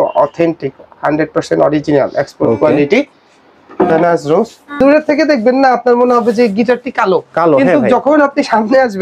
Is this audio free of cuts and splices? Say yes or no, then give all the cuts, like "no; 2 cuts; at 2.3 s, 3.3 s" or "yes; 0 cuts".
no; 1 cut; at 4.8 s